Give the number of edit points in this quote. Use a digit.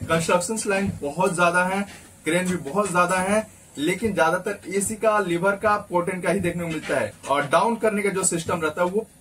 1